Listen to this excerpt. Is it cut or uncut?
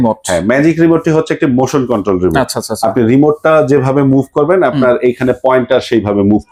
uncut